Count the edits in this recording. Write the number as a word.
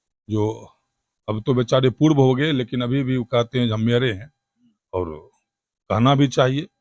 zero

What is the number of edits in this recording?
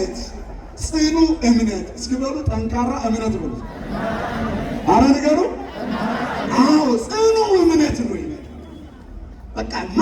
zero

